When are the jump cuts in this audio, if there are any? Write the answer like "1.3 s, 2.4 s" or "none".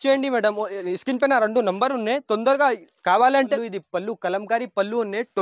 3.6 s